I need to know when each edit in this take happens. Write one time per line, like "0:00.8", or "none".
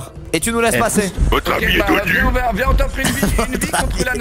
0:01.2